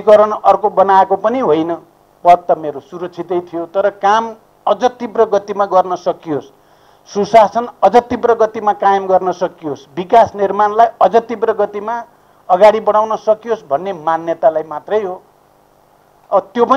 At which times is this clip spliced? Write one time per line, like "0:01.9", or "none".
none